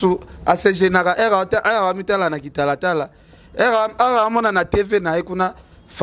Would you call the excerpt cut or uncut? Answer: uncut